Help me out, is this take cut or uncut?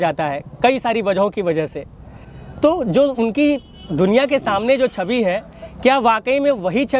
uncut